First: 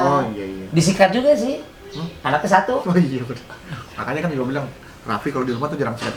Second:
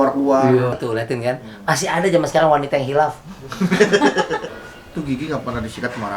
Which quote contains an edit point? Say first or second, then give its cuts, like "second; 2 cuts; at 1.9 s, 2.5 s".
second; 2 cuts; at 0.8 s, 4.4 s